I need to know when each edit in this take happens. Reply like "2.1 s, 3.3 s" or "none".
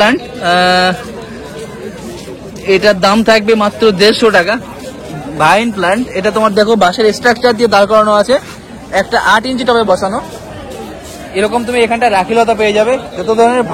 none